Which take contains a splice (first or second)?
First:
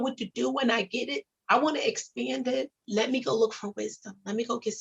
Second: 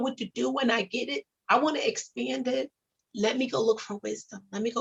first